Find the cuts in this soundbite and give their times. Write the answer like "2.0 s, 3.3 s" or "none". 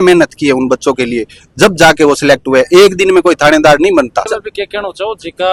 none